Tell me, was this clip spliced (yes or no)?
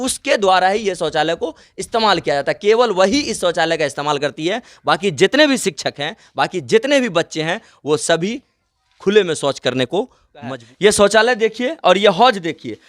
yes